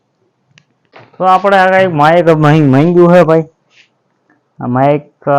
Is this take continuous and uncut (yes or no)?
no